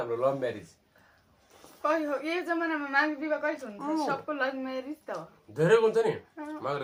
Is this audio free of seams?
yes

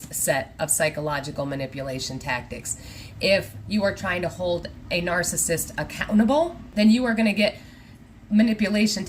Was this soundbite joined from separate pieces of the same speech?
yes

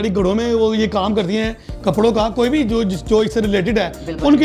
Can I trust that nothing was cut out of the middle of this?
yes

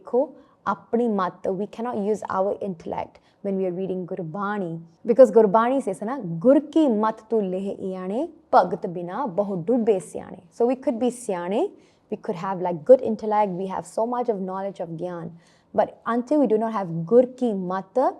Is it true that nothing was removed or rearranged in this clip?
yes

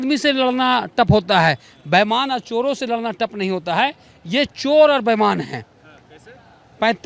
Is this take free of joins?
yes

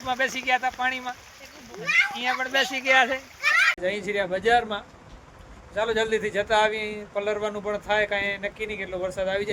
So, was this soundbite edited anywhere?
yes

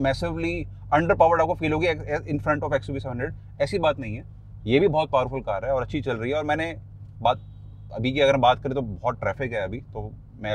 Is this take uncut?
yes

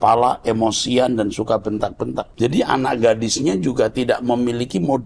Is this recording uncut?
no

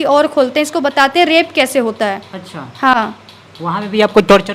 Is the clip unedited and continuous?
yes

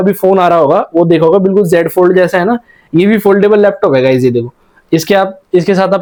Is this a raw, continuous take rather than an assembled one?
yes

